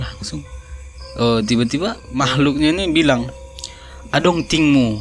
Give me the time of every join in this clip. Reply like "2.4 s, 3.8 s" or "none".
2.0 s